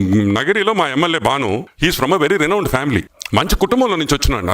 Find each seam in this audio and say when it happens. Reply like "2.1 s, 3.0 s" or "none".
1.7 s, 3.2 s